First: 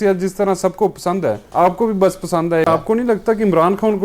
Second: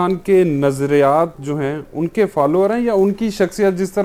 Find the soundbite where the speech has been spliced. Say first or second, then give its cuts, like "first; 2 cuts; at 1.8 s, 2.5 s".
first; 2 cuts; at 1.4 s, 2.6 s